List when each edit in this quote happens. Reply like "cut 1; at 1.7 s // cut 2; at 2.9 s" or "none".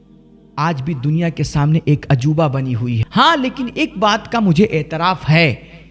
cut 1; at 3.0 s